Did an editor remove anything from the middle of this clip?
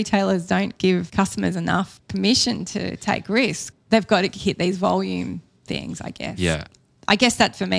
yes; 4 cuts; at 1.1 s, 2.0 s, 3.6 s, 6.7 s

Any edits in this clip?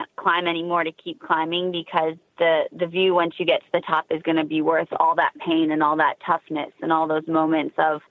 no; 0 cuts

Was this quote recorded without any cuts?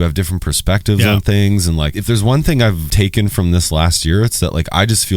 no; 2 cuts; at 1.9 s, 2.9 s

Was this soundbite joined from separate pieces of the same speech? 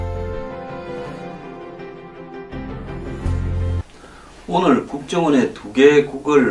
no; 0 cuts

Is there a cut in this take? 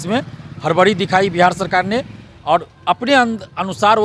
no; 0 cuts

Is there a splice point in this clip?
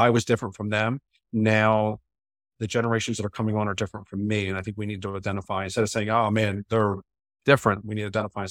no; 0 cuts

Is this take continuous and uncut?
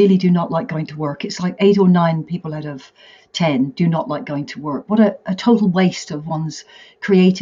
yes; 0 cuts

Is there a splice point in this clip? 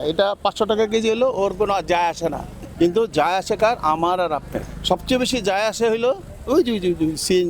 no; 0 cuts

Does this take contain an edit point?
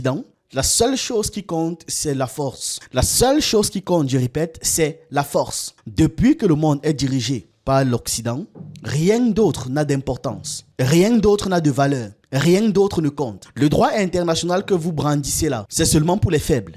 no; 0 cuts

